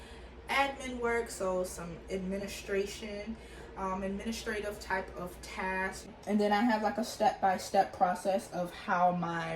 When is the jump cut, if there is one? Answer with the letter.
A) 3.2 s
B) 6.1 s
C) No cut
B